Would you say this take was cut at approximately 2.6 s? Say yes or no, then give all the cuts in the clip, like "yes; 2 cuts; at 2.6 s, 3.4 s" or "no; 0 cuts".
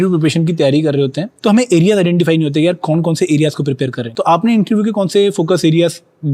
no; 2 cuts; at 1.2 s, 4.0 s